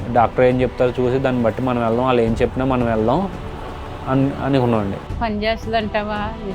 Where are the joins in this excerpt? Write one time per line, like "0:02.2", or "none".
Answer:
0:05.0